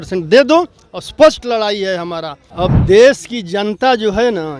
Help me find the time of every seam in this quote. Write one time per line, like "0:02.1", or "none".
0:02.4